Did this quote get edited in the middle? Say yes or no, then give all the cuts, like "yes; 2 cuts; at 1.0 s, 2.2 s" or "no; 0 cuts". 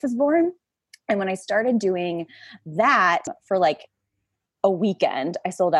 yes; 1 cut; at 3.4 s